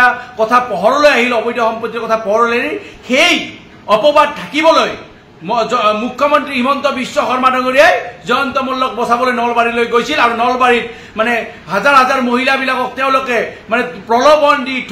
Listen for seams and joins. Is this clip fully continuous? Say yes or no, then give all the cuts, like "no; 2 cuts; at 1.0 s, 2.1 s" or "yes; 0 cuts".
yes; 0 cuts